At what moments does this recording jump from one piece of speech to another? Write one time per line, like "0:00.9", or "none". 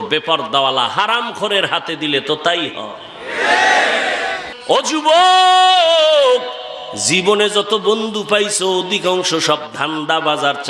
0:04.5